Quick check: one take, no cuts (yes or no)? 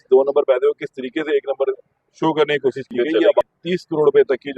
no